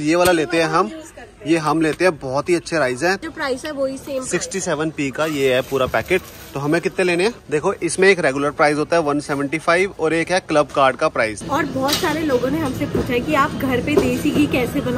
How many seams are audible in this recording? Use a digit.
3